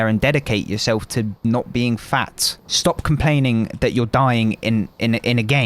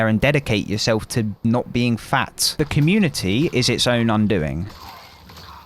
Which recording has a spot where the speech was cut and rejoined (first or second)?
second